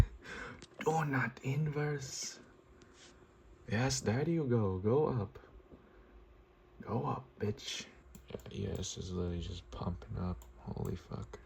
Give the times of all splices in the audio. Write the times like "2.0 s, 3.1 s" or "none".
7.9 s

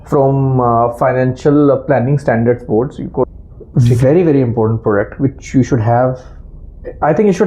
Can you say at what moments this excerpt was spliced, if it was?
3.2 s

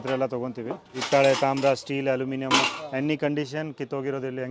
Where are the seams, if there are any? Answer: 0.9 s

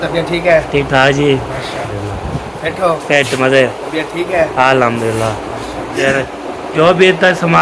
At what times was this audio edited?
1.9 s, 6.0 s

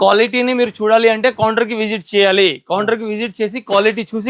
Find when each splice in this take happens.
none

